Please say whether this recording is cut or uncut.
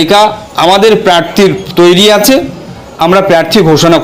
uncut